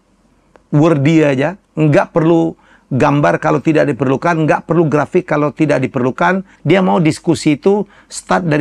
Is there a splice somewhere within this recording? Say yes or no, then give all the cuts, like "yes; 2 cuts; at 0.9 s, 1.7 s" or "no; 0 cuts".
yes; 1 cut; at 6.5 s